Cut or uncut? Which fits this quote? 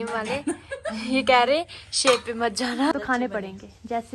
cut